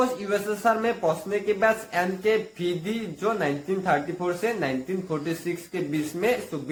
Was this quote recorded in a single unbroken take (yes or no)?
yes